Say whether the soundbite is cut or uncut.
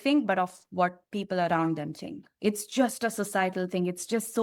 uncut